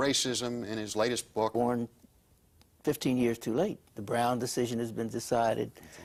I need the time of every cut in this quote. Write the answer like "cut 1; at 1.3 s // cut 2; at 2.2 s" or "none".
none